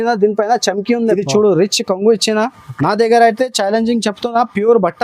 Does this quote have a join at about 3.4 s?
no; 1 cut; at 1.2 s

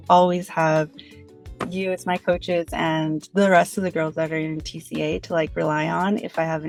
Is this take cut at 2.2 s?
no; 0 cuts

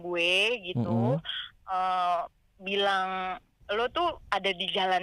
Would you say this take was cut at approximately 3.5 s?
yes; 1 cut; at 3.5 s

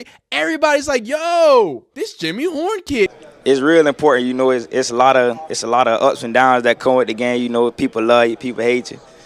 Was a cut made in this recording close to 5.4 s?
no; 2 cuts; at 1.8 s, 3.1 s

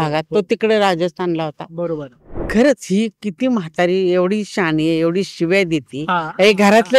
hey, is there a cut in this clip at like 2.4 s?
yes; 1 cut; at 2.4 s

